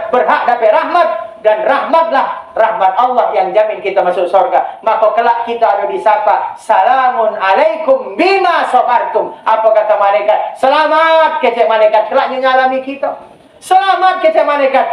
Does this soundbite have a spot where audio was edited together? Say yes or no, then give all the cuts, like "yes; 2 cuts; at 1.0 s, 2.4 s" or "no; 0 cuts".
no; 0 cuts